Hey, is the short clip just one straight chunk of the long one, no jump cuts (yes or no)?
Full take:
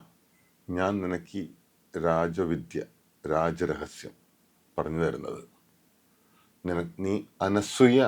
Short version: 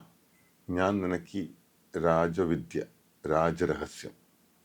yes